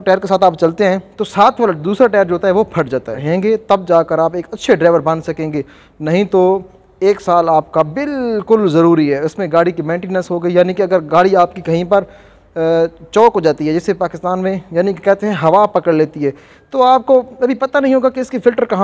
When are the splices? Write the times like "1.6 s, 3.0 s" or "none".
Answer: 3.2 s